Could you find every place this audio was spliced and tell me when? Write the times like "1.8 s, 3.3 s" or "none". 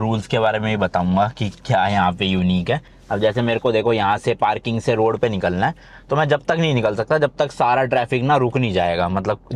none